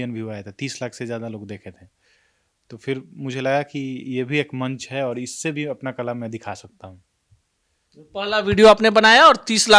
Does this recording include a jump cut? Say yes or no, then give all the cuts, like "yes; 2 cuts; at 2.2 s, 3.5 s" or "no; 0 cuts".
no; 0 cuts